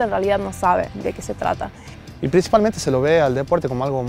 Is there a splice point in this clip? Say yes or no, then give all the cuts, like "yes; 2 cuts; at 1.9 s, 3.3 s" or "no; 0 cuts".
yes; 1 cut; at 2.1 s